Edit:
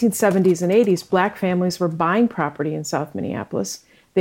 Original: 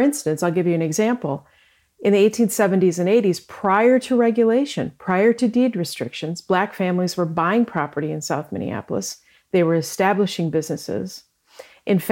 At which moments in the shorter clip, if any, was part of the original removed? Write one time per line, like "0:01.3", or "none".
0:01.0